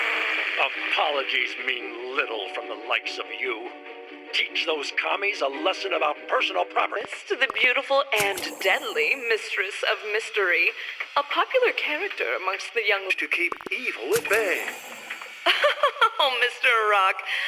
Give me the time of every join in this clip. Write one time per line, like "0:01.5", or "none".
0:07.0
0:13.1